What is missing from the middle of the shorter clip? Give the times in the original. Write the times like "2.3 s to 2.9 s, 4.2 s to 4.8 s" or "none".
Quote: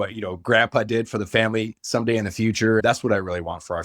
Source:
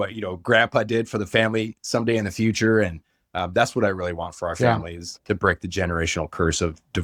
2.8 s to 3.5 s